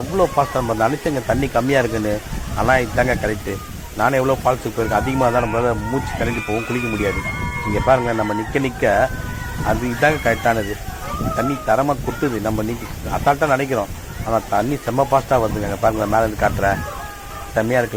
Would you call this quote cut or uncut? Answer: uncut